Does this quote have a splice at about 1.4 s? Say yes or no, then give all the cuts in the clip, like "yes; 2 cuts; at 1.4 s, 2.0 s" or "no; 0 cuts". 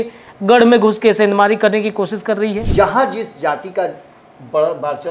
no; 1 cut; at 2.7 s